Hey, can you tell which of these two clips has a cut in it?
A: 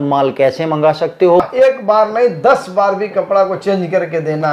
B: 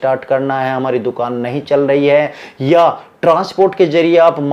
A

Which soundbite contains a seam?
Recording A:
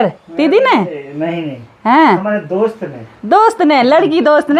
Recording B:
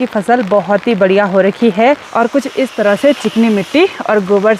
B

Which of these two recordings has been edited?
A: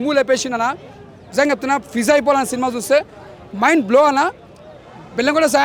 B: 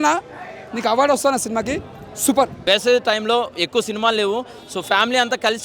B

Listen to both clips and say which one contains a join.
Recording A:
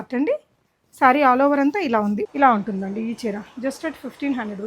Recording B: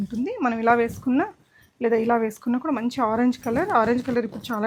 A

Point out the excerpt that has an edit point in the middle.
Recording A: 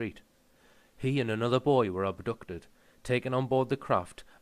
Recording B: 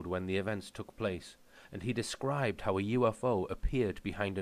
B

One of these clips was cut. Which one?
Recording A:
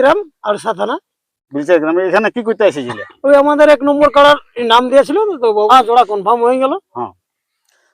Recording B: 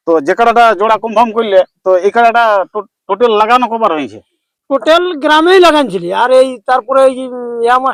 A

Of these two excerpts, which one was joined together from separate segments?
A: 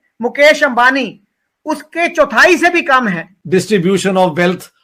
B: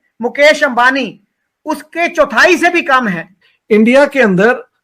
B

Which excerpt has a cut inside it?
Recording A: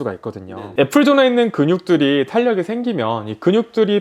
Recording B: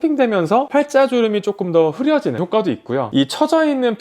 B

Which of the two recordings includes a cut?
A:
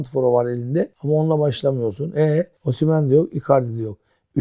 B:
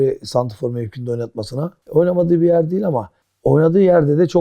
B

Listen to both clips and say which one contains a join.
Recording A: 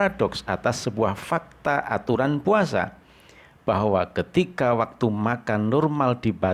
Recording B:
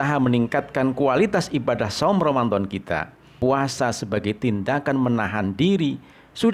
B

